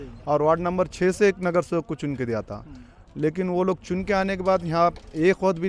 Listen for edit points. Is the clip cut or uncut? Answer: uncut